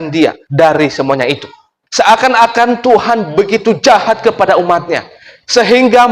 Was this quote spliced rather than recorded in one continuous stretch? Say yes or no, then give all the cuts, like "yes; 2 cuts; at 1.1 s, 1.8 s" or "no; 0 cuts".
yes; 1 cut; at 1.7 s